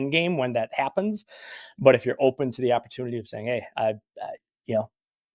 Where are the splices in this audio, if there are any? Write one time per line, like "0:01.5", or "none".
0:04.4